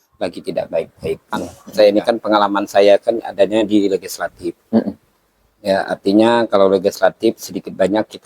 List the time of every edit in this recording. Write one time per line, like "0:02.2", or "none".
0:01.5